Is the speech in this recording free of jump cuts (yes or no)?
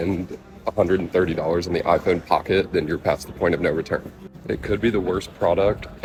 yes